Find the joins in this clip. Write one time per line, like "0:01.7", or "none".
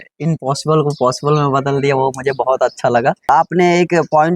0:03.3

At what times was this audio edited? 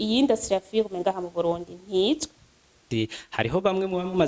0:02.8

